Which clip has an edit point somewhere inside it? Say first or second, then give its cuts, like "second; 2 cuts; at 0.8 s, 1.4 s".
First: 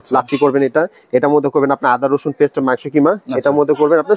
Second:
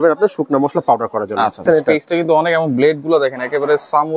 second; 1 cut; at 1.6 s